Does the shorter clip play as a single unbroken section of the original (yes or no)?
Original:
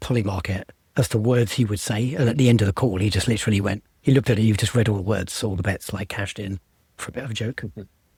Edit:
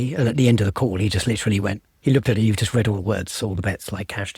yes